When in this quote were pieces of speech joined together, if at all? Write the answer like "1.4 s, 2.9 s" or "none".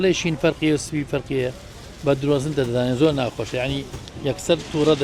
none